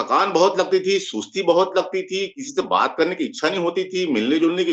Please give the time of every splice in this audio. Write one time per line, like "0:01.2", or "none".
none